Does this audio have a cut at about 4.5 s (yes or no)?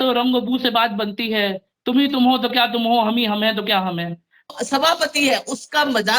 yes